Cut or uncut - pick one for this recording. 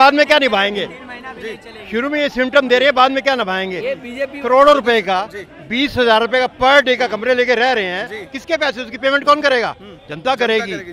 uncut